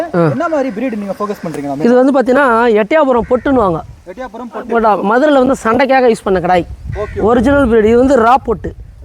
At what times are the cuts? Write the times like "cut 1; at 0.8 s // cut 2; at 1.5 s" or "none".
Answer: none